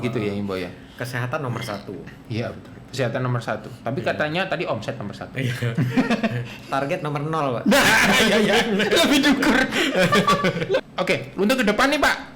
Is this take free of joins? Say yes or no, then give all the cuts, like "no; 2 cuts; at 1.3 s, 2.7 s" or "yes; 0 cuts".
no; 1 cut; at 10.8 s